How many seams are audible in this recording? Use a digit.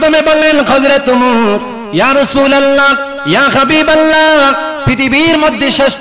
3